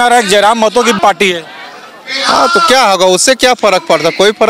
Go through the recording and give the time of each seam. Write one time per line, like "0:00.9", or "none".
0:01.0